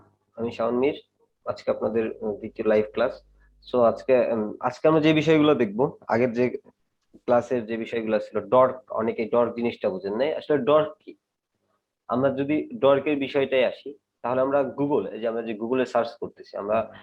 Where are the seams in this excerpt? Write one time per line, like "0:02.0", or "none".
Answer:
none